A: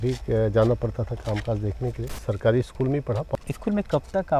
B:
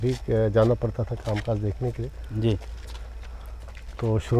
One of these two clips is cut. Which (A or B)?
A